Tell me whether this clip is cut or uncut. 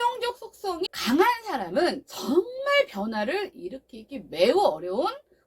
cut